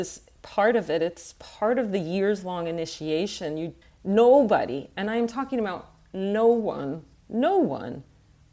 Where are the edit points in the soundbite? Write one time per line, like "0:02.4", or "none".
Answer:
0:03.8